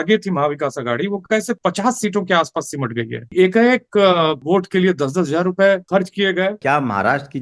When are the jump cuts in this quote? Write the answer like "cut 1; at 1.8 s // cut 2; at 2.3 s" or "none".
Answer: cut 1; at 1.6 s // cut 2; at 3.3 s // cut 3; at 4.4 s // cut 4; at 6.5 s